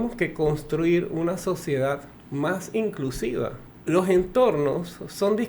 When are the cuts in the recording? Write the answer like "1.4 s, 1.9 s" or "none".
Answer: 2.2 s, 3.7 s